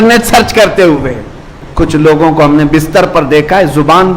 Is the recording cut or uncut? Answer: cut